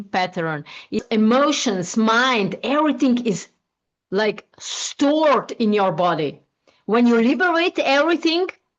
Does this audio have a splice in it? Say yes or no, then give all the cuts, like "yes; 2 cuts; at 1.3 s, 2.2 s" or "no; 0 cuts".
yes; 1 cut; at 1.0 s